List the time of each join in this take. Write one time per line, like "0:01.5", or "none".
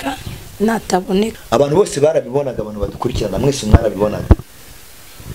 0:01.4